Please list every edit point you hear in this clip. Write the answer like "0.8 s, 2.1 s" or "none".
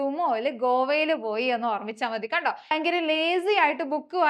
2.7 s